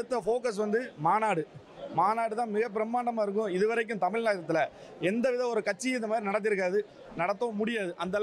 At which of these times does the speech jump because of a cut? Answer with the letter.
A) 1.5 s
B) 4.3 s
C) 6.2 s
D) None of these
D